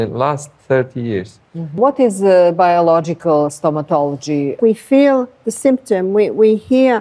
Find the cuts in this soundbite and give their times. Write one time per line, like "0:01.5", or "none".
0:01.8
0:04.5